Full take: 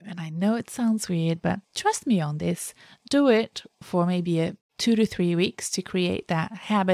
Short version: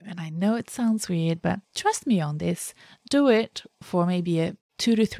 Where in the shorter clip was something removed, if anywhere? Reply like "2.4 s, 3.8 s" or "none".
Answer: none